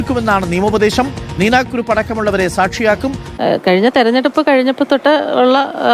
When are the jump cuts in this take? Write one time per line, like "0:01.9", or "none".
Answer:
0:03.2